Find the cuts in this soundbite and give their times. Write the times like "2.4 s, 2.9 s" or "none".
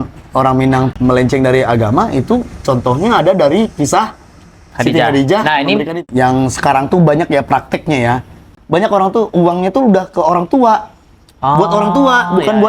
0.9 s, 5.9 s, 8.5 s